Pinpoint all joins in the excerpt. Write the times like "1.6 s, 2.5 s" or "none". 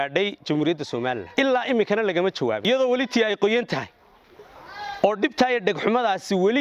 1.2 s, 2.7 s